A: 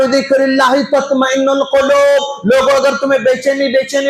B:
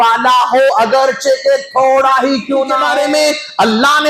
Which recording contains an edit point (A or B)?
B